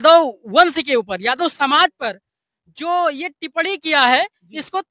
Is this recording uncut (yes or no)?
yes